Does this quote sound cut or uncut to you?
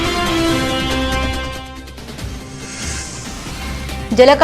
uncut